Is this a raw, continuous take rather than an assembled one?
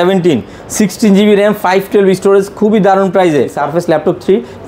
no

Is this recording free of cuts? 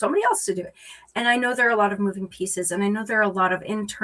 yes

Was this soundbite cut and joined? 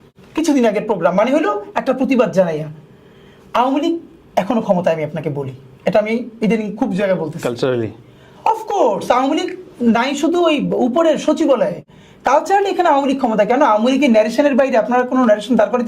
no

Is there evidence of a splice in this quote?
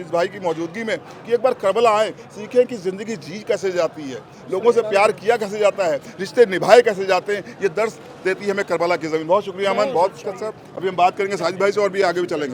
no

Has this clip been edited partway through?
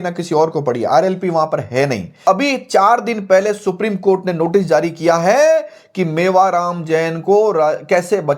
yes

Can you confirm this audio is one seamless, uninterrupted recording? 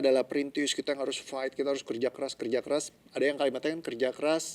yes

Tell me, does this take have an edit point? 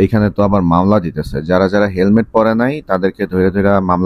no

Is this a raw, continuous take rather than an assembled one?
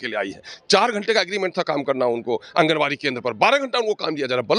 yes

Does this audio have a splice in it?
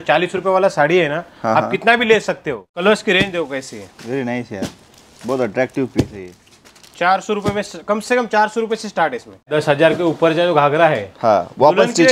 yes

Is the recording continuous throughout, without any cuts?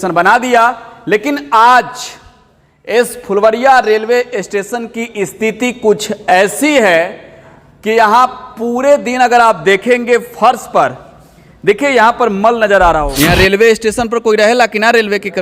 no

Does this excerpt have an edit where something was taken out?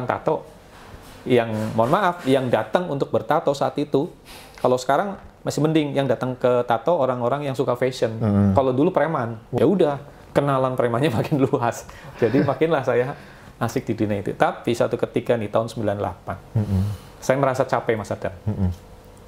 yes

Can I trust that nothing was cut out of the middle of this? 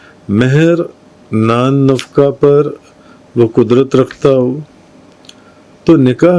yes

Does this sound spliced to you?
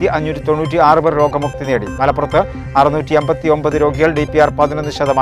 no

